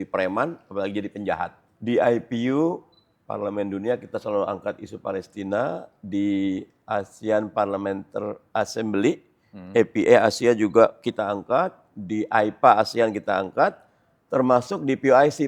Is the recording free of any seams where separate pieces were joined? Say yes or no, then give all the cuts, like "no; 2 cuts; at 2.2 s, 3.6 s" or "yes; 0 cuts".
no; 1 cut; at 1.7 s